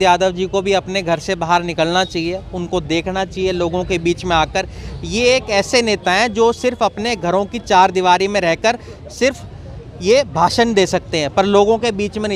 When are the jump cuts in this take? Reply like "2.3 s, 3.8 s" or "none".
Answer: none